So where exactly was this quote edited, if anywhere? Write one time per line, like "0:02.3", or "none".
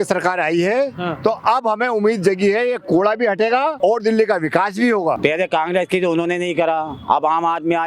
0:03.8
0:05.2